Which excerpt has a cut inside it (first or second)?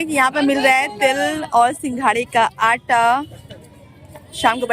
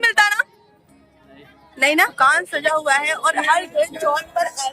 second